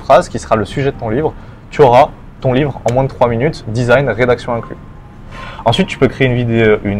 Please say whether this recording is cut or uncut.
uncut